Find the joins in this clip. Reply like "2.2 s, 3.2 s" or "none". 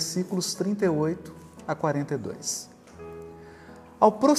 none